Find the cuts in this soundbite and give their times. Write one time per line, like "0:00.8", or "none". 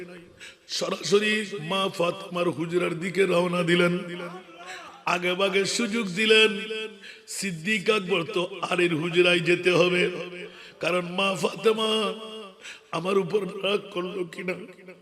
0:01.6